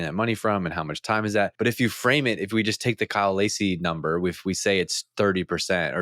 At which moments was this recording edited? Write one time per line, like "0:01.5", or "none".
0:01.5